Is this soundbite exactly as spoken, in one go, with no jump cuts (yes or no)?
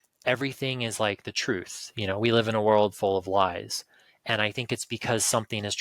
yes